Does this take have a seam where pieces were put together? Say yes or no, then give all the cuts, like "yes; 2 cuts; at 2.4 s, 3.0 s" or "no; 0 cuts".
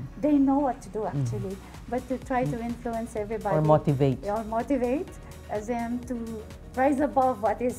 no; 0 cuts